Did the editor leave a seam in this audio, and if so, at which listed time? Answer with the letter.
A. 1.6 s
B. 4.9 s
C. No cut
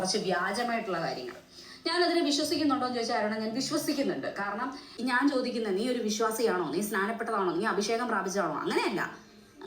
B